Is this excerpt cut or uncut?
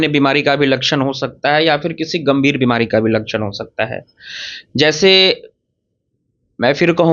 uncut